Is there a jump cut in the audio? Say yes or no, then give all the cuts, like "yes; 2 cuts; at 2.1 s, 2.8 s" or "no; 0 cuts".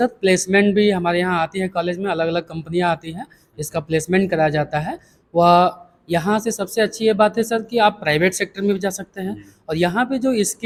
no; 0 cuts